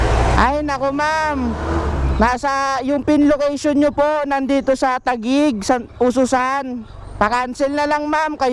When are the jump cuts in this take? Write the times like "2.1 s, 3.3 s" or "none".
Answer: none